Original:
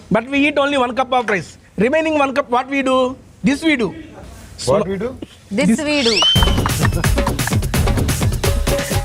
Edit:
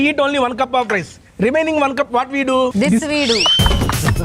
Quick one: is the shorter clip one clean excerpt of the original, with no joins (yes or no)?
no